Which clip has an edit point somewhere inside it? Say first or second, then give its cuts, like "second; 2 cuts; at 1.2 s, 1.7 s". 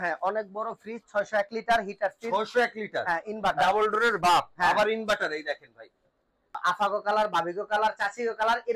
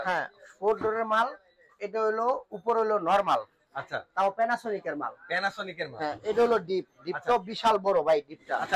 first; 1 cut; at 6.6 s